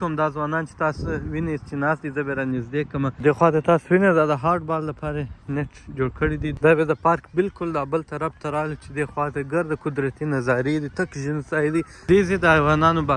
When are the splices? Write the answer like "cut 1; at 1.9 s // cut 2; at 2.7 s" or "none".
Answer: cut 1; at 3.2 s // cut 2; at 6.5 s // cut 3; at 12.1 s